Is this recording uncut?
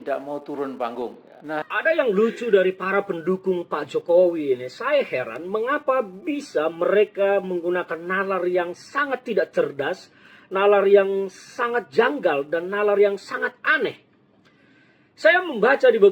no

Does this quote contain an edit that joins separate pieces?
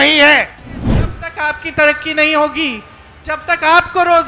yes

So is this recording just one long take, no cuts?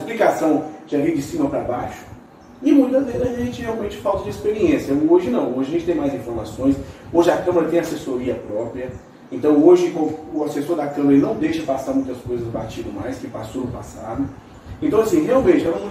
yes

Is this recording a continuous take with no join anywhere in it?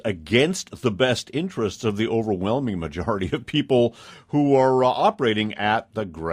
yes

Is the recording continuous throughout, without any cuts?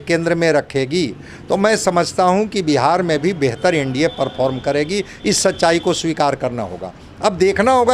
yes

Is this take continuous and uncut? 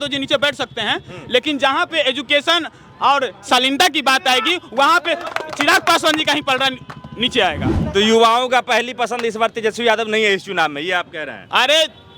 no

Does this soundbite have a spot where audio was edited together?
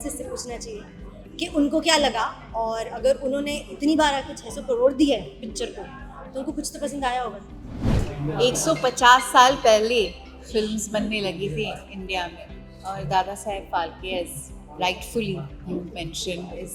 yes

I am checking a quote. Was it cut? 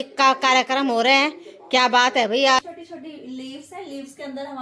yes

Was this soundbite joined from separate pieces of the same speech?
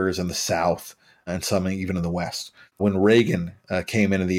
yes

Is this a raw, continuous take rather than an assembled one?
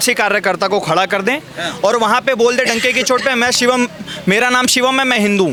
yes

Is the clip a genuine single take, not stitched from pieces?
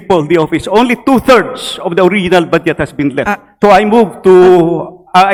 yes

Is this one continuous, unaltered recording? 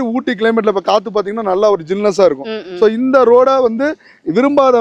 yes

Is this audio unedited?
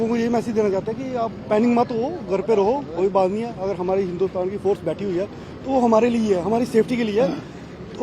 yes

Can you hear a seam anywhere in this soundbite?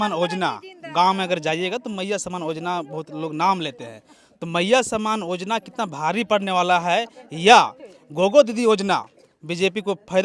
no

